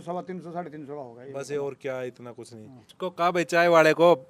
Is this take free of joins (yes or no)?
no